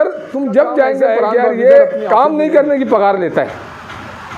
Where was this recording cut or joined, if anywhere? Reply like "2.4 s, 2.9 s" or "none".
1.2 s